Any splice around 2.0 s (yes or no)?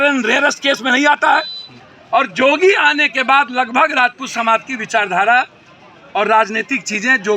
yes